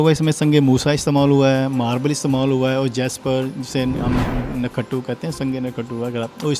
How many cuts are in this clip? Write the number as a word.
zero